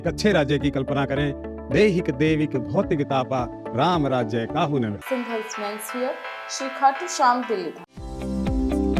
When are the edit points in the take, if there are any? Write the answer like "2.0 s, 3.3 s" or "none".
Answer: 7.8 s